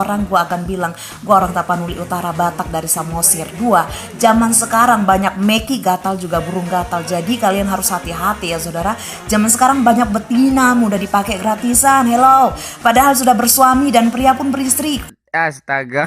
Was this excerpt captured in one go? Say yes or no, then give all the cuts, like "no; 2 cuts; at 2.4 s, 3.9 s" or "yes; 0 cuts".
no; 1 cut; at 15.1 s